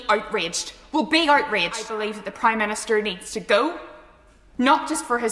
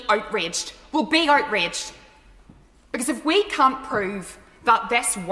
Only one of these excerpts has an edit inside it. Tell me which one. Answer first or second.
first